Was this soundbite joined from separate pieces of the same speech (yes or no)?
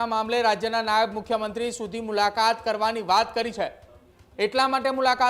no